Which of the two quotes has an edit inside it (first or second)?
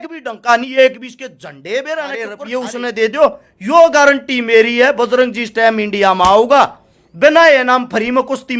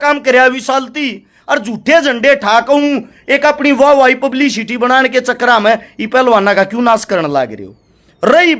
first